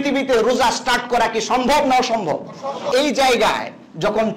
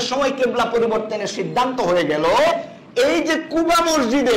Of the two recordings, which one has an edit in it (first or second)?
first